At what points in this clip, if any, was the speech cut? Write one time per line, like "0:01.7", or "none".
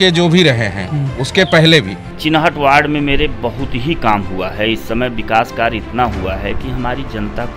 0:02.0